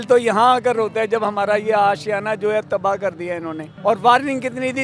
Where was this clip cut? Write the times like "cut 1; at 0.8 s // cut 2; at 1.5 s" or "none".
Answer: none